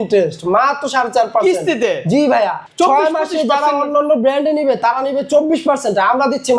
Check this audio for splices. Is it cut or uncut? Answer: cut